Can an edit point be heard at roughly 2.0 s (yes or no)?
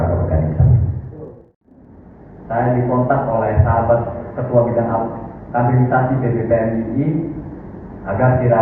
yes